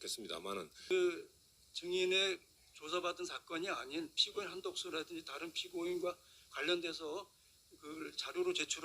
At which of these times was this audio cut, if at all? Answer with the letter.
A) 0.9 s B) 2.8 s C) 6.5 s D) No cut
A